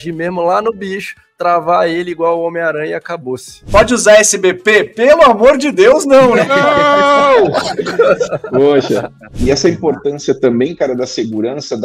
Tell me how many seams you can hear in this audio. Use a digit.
2